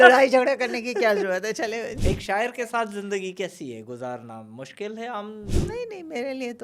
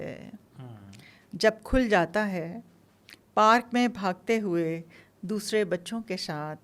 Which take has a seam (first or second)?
first